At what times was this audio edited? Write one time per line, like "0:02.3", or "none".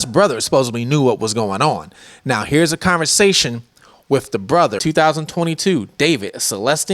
0:04.8

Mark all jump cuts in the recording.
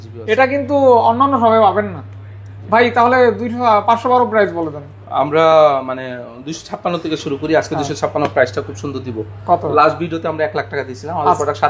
none

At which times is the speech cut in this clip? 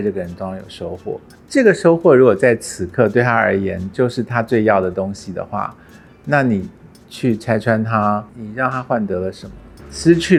none

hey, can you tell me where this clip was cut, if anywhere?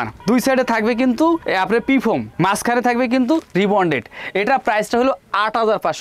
none

